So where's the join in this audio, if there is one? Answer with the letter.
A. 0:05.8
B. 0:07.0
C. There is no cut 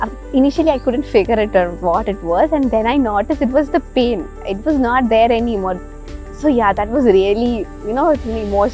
A